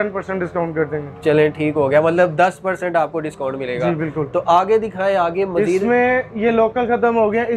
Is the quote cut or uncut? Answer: uncut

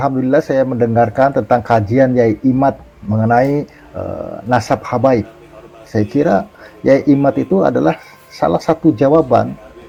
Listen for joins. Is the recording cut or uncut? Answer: uncut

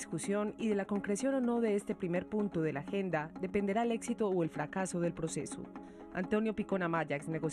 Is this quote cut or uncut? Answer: uncut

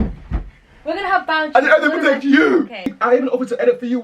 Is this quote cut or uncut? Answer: cut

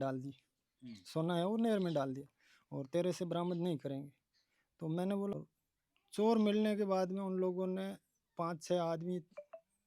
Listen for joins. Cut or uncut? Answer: cut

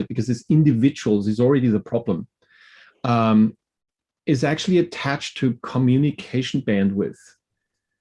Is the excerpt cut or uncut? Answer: uncut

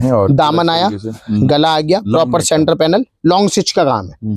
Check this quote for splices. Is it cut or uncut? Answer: uncut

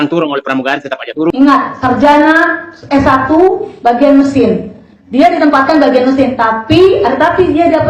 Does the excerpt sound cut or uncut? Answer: cut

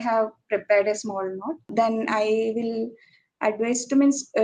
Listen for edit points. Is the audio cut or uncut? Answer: cut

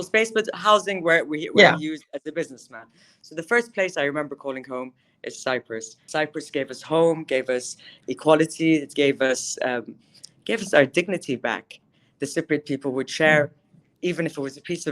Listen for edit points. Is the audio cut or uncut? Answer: cut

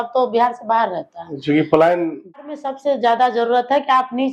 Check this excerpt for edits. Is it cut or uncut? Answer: cut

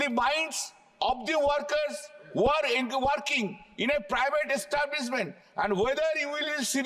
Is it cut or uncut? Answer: uncut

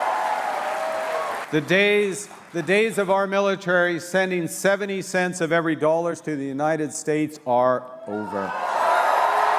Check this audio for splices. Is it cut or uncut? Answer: cut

